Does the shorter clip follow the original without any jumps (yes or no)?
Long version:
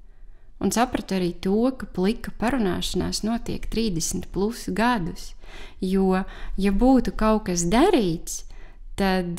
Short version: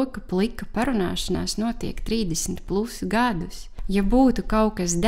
no